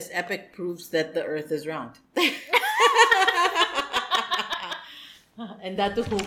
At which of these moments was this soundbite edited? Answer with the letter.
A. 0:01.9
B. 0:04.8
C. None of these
A